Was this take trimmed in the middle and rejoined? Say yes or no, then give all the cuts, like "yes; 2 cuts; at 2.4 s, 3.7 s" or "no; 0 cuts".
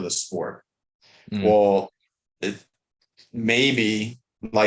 no; 0 cuts